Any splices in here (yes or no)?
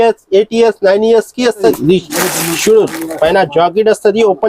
yes